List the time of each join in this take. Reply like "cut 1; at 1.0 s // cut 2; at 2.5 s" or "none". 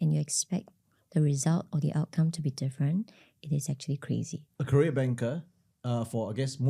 cut 1; at 4.4 s